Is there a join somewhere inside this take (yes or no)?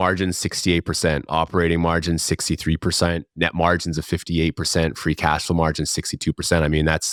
no